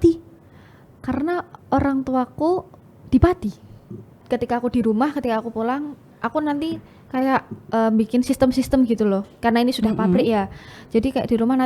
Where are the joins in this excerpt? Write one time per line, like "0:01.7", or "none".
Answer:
0:04.2